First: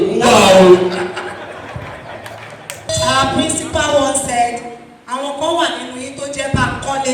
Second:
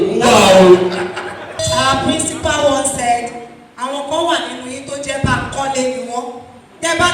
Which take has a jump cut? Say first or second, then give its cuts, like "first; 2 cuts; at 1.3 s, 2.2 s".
second; 1 cut; at 1.4 s